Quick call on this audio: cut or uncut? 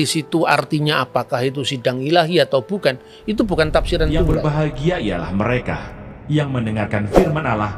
cut